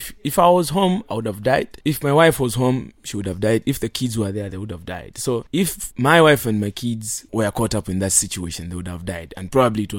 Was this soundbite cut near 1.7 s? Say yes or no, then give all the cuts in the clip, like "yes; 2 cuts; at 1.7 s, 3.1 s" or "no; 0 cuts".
yes; 3 cuts; at 1.7 s, 5.6 s, 7.1 s